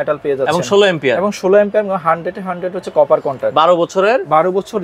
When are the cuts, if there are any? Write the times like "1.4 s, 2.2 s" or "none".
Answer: none